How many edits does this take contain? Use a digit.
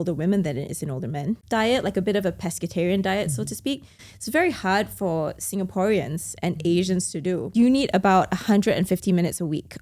2